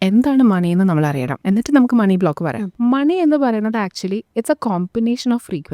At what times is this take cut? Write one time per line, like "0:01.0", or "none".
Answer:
0:01.3
0:02.7